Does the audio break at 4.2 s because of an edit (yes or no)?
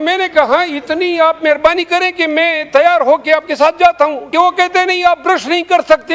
yes